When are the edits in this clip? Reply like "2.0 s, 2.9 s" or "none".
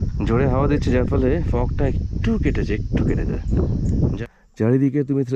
4.2 s